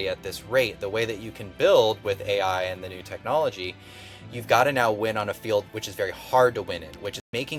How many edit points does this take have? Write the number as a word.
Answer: zero